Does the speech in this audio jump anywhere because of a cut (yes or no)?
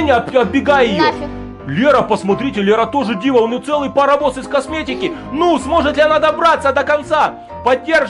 no